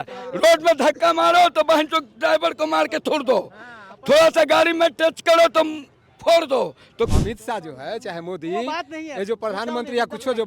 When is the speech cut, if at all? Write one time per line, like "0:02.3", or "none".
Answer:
0:07.1